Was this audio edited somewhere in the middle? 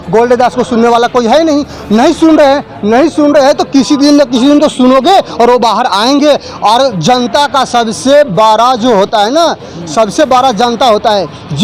no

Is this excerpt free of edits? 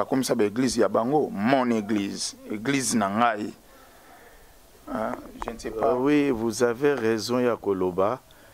yes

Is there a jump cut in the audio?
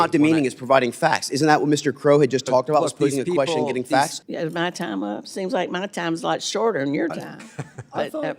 yes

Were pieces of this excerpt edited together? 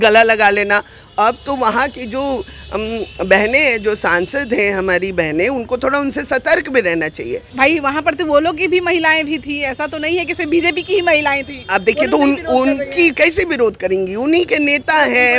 yes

